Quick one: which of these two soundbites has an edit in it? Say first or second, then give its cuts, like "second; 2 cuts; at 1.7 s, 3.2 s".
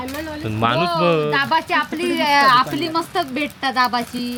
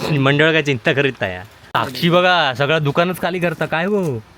second; 1 cut; at 1.7 s